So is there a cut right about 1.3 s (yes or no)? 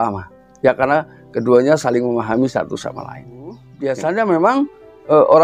no